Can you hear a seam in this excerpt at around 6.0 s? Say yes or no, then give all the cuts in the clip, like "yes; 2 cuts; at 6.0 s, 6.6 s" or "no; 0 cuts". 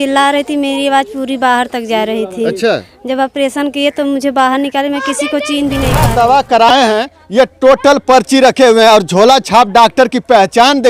yes; 1 cut; at 6.0 s